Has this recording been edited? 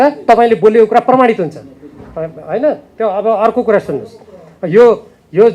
no; 0 cuts

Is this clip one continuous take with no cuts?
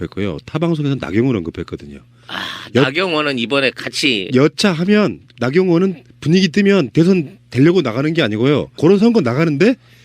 yes; 0 cuts

